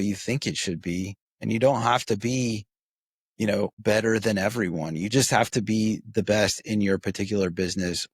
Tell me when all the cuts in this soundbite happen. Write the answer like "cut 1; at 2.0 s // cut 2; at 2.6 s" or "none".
cut 1; at 1.2 s // cut 2; at 3.8 s

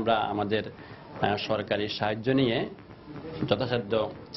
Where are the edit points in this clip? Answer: none

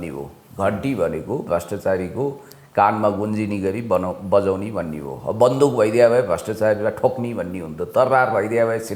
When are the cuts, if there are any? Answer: none

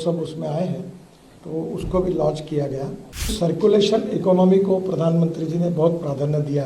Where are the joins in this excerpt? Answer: cut 1; at 3.3 s

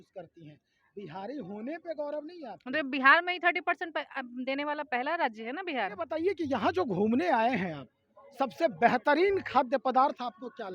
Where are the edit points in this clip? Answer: cut 1; at 6.1 s

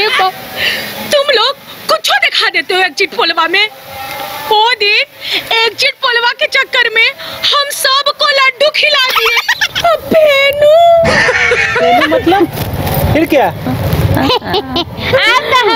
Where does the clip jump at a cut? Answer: none

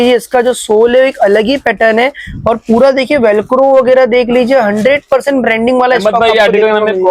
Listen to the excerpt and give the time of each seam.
none

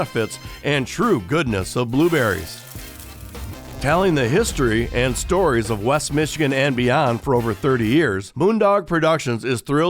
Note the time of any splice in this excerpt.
cut 1; at 8.2 s

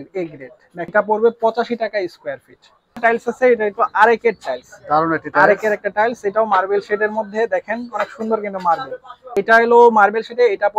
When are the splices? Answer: cut 1; at 0.9 s // cut 2; at 3.0 s

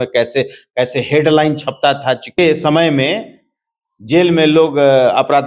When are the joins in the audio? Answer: cut 1; at 2.3 s

